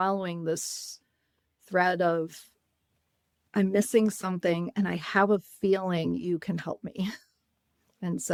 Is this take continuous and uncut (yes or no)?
yes